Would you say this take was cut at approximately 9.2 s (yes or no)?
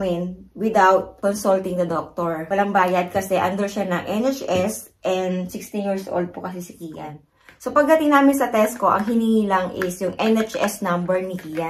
no